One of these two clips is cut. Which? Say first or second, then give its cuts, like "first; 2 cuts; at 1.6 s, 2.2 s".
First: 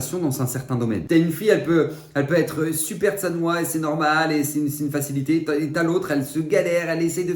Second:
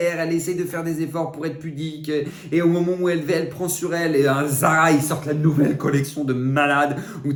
first; 1 cut; at 1.0 s